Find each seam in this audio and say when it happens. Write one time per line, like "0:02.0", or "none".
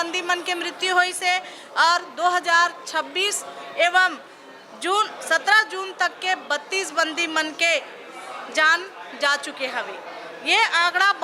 none